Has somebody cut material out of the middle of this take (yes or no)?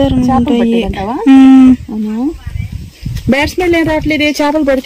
no